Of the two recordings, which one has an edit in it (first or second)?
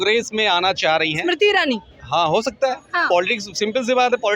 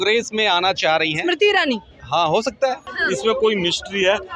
second